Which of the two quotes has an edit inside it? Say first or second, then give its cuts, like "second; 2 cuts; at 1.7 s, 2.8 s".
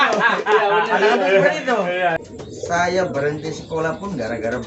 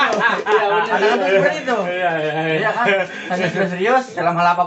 first; 1 cut; at 2.2 s